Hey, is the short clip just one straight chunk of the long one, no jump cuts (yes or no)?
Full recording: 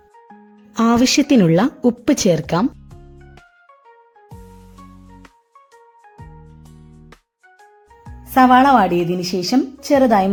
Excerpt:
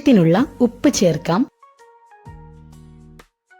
no